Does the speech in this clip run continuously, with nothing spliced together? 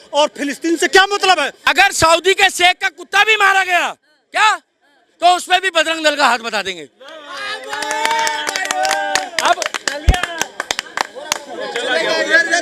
no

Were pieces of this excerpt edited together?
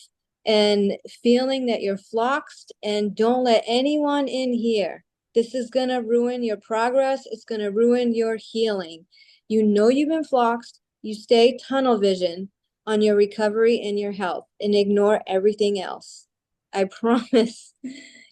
no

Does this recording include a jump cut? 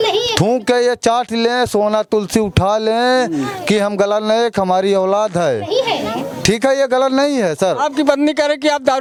no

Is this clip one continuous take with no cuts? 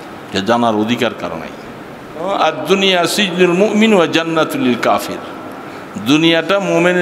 no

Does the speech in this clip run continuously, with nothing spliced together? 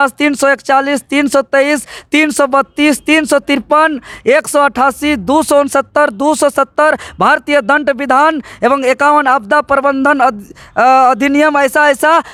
yes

